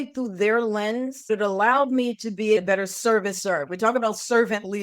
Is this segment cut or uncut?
cut